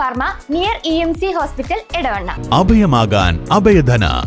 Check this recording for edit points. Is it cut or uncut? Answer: uncut